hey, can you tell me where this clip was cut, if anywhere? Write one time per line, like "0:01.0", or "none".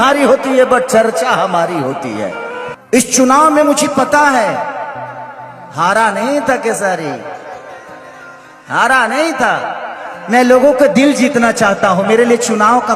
0:02.7